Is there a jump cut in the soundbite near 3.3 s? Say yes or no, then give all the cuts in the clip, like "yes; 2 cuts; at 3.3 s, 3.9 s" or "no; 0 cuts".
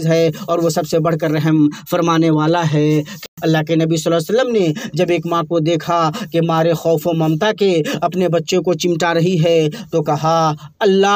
yes; 1 cut; at 3.3 s